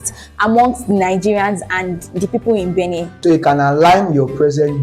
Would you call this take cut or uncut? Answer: cut